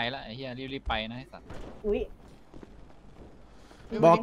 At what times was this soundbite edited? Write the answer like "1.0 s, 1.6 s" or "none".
none